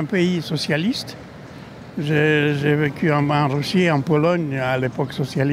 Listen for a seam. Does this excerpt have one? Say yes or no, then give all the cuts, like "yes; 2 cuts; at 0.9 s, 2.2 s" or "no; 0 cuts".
no; 0 cuts